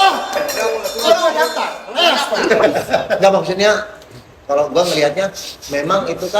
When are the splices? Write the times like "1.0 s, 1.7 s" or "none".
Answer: 2.6 s